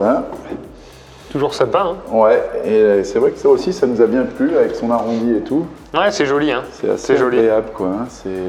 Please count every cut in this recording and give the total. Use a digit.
0